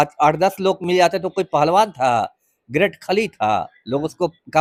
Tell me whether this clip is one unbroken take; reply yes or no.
yes